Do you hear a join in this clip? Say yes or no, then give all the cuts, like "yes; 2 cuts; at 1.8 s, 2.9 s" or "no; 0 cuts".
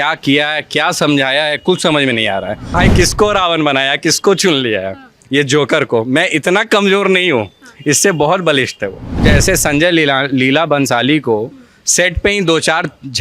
yes; 2 cuts; at 2.8 s, 9.2 s